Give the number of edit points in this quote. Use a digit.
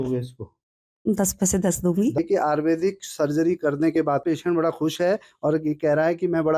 2